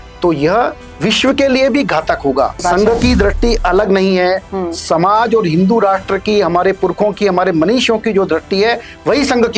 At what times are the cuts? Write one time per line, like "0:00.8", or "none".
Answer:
0:02.6